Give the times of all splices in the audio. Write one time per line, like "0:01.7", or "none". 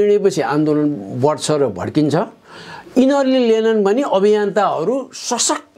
none

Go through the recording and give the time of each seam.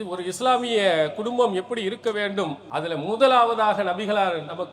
0:02.6

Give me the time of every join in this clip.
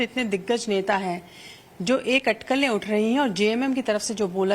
0:03.6

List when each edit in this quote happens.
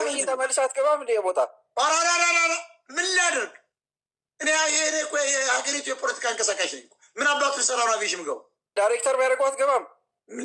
0:08.7

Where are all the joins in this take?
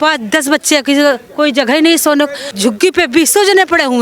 0:02.5

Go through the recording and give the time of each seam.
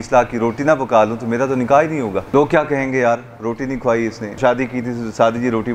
0:02.3
0:04.3

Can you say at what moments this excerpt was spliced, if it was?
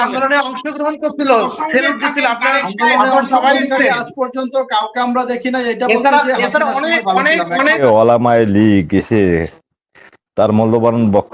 0:07.8

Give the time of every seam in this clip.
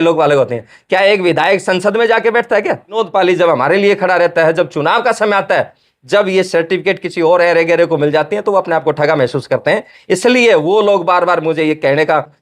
0:03.0

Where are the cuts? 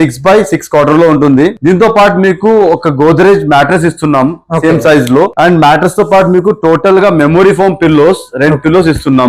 0:01.6
0:05.3

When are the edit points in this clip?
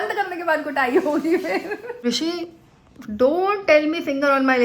0:02.0

